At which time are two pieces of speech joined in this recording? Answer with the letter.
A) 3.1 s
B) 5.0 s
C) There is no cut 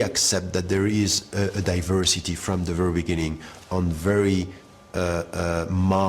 C